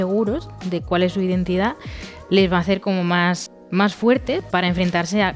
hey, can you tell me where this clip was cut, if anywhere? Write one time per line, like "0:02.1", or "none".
0:03.5
0:04.4